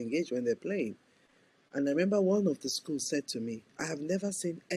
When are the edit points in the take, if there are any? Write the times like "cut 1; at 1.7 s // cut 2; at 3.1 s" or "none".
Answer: none